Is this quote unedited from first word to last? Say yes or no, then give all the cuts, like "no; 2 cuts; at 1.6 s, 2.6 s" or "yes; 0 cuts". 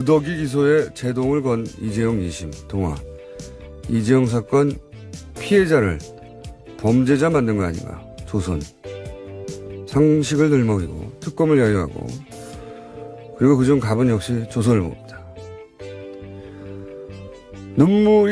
yes; 0 cuts